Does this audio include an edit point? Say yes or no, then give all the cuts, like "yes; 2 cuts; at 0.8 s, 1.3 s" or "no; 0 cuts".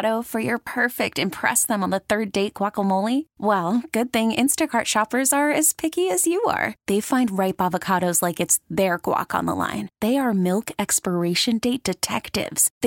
no; 0 cuts